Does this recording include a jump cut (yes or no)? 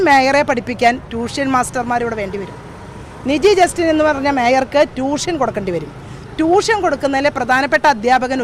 no